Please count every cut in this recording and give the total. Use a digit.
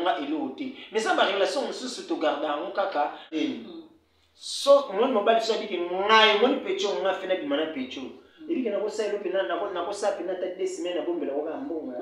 1